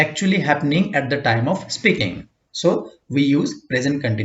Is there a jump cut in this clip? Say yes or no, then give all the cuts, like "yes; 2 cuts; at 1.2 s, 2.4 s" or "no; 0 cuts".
no; 0 cuts